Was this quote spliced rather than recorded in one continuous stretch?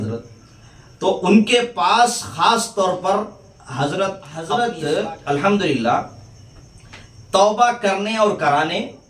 yes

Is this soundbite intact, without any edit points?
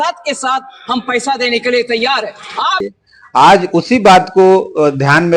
yes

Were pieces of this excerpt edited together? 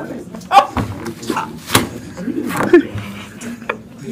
no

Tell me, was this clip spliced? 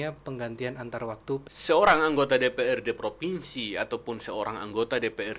yes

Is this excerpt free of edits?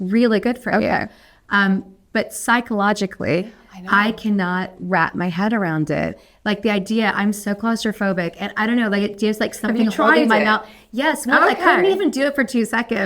yes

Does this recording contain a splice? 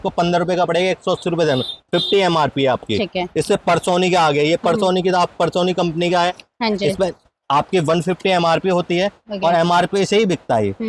no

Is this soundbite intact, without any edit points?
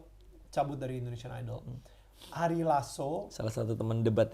yes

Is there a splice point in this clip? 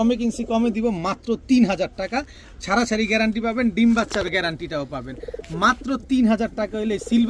no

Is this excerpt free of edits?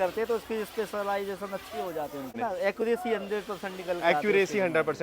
no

